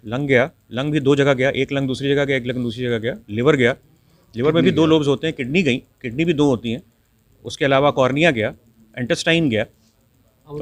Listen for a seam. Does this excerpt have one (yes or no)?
no